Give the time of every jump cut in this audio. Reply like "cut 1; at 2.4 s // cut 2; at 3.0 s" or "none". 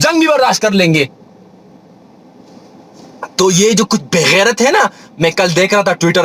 none